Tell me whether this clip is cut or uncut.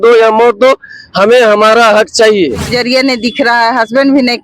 cut